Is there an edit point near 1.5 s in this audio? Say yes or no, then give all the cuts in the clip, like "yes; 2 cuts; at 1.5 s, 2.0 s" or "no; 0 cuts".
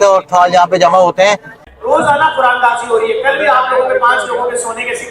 yes; 1 cut; at 1.5 s